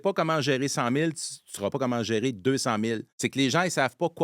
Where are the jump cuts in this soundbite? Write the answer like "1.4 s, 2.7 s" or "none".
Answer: 3.1 s

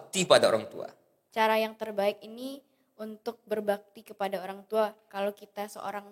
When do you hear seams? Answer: 1.2 s

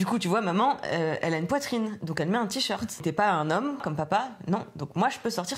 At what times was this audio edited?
3.0 s, 3.8 s

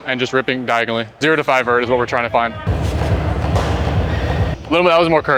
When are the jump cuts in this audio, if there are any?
1.1 s, 2.7 s, 4.6 s

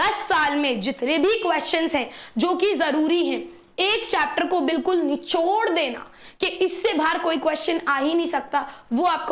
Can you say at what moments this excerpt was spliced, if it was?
none

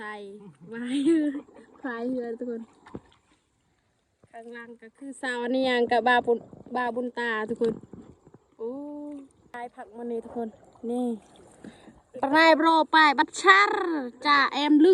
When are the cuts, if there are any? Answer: none

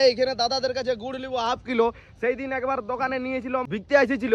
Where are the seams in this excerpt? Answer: none

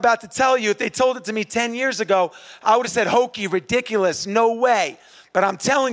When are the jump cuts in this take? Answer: none

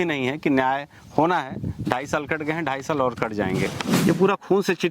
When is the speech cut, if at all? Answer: 3.9 s

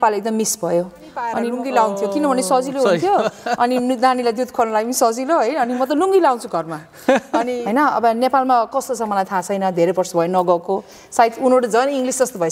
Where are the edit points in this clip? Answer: 1.3 s, 7.6 s

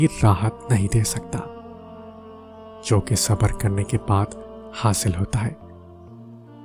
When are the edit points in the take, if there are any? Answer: none

